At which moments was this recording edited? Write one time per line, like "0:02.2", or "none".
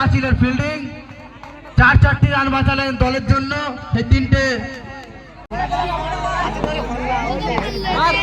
0:05.5